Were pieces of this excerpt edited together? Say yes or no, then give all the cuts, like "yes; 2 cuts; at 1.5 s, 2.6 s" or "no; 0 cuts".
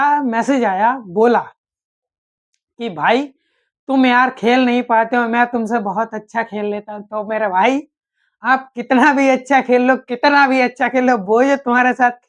no; 0 cuts